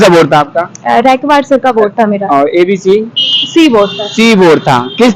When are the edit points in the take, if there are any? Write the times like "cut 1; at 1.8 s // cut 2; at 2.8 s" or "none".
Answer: none